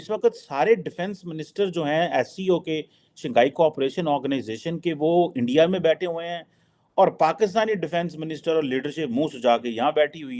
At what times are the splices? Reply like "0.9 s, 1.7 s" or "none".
none